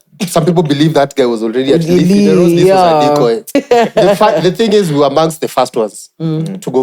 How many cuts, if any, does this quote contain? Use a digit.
1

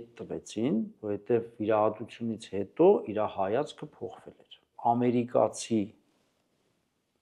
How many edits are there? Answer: 1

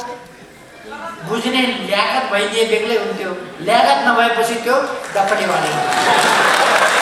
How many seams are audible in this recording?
0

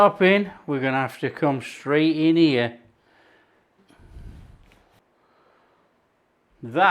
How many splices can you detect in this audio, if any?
2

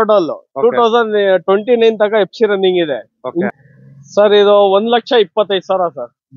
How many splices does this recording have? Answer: 1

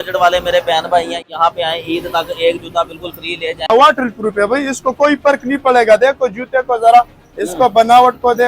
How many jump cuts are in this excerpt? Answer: 2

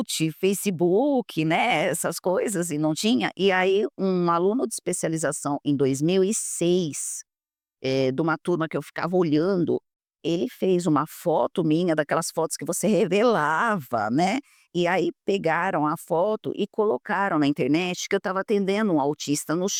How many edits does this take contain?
0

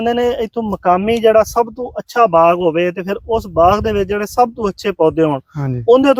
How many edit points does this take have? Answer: 0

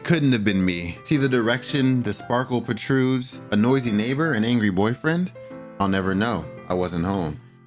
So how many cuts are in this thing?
2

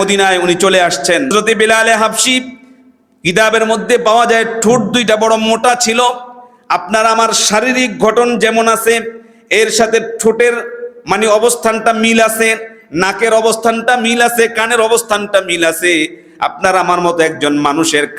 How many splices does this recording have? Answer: 1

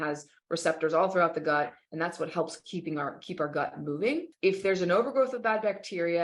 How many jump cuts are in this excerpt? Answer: 1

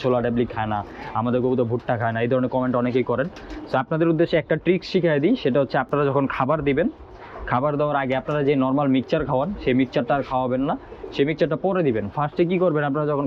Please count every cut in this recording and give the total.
0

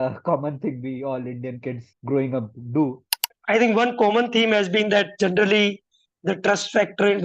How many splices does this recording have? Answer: 2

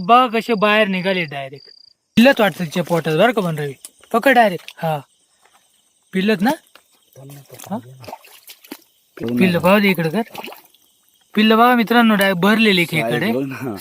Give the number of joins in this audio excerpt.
2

